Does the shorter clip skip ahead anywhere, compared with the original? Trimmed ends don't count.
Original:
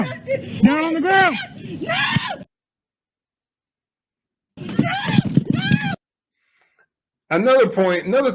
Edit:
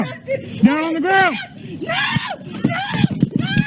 yes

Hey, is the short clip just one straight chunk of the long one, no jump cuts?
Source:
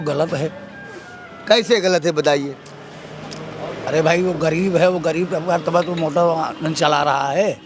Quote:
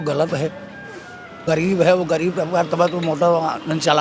no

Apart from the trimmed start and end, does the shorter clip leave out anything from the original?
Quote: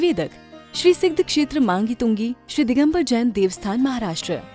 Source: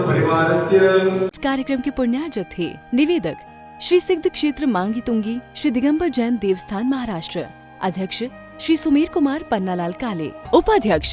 no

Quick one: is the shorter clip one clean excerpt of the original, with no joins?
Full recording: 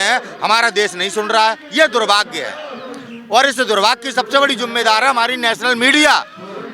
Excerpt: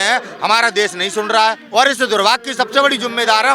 no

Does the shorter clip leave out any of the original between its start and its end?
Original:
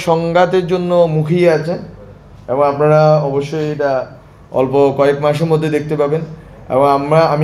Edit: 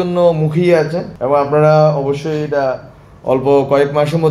yes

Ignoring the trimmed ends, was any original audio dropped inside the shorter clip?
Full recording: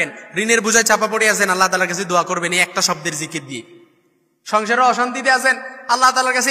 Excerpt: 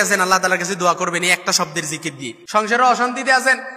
yes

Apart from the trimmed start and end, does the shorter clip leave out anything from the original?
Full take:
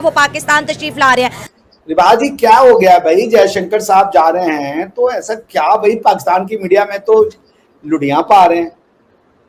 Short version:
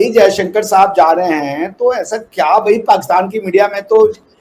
no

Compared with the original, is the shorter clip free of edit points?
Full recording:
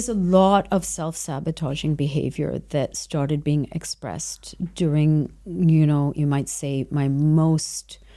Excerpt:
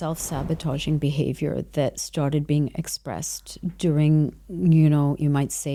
yes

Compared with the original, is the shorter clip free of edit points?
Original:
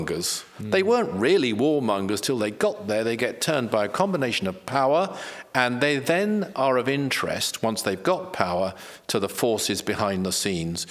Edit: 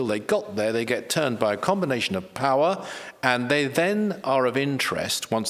yes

